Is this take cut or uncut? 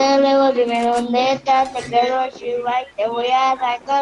uncut